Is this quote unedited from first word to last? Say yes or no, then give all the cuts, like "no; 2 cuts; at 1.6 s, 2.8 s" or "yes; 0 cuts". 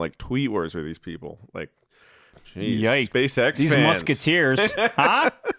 no; 2 cuts; at 2.3 s, 3.1 s